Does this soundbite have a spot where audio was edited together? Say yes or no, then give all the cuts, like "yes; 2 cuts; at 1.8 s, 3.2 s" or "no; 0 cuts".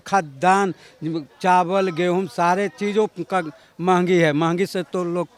no; 0 cuts